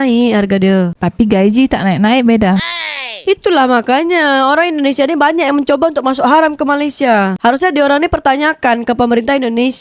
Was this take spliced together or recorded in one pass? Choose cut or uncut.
cut